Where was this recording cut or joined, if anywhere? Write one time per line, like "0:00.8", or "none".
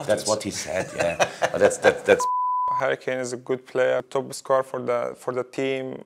0:02.8
0:04.1